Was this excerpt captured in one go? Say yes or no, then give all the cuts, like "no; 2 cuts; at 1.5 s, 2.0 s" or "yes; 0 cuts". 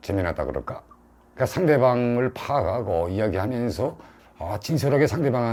yes; 0 cuts